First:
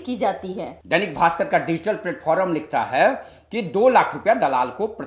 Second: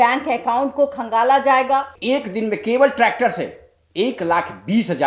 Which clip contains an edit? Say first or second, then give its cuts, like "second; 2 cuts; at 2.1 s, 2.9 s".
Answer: second; 1 cut; at 1.9 s